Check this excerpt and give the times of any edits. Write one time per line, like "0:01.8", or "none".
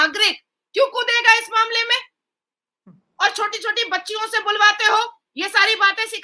none